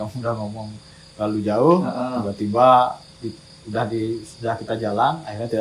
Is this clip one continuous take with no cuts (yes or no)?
yes